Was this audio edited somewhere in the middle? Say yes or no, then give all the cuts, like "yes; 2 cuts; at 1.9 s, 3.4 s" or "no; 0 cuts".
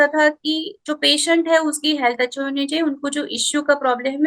no; 0 cuts